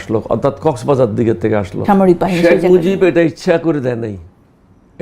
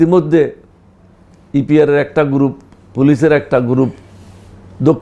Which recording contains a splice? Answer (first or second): first